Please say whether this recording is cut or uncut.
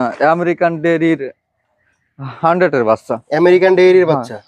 uncut